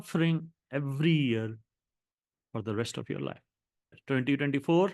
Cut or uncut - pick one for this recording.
cut